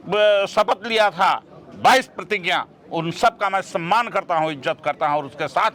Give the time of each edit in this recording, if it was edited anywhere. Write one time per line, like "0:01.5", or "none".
none